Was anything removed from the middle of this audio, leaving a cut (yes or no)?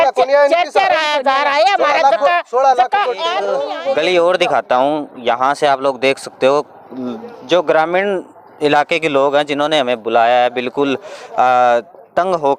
yes